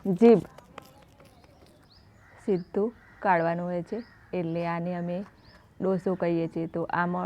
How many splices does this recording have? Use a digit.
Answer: 1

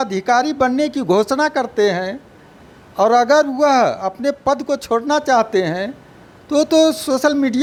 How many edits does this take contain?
0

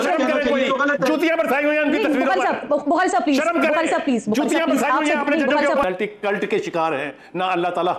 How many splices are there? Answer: 1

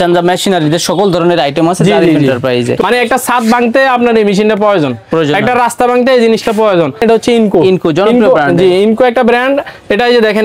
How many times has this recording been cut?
2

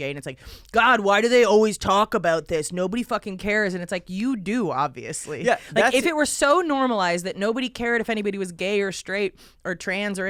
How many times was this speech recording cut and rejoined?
0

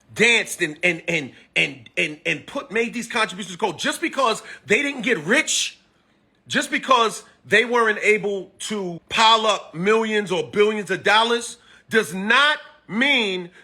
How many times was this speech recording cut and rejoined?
1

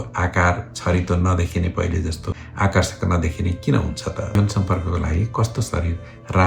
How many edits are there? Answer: 1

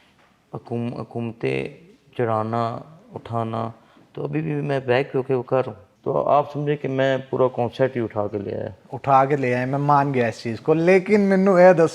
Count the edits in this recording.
1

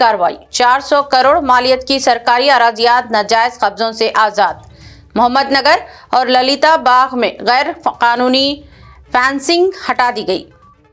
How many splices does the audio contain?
0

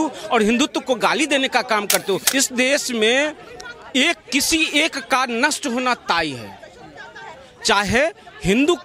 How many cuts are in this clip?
1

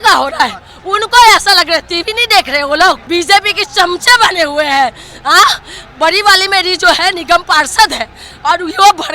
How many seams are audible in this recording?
1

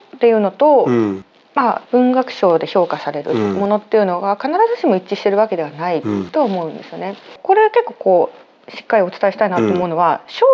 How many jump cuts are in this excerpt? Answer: 2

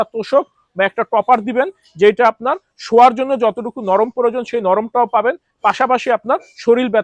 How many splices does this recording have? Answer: 0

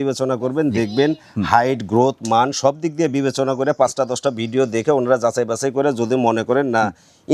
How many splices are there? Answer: 0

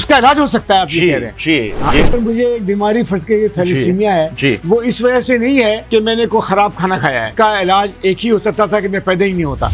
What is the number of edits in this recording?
3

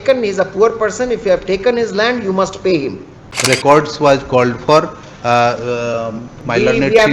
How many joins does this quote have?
1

